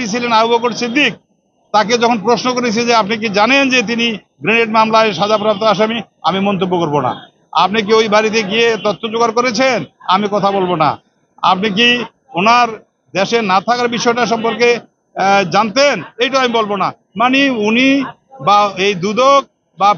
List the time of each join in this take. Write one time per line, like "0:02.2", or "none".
none